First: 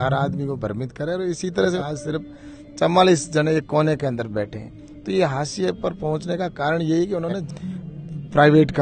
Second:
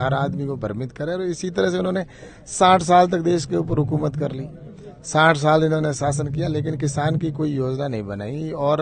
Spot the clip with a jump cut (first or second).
first